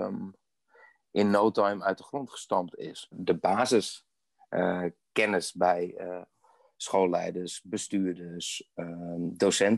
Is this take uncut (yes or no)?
no